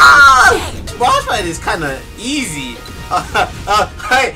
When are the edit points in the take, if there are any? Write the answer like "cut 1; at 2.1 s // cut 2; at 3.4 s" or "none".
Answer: cut 1; at 0.9 s